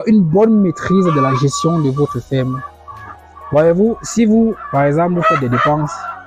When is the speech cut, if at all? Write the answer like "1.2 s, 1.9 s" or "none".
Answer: none